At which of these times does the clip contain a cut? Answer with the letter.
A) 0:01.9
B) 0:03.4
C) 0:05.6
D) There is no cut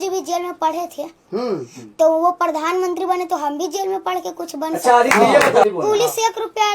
C